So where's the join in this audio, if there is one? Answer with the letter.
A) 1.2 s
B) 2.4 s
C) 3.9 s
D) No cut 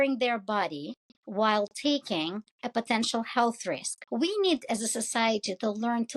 C